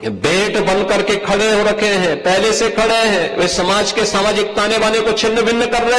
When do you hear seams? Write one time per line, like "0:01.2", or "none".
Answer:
none